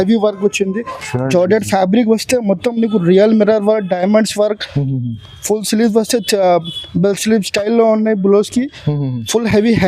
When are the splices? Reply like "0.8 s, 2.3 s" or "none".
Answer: none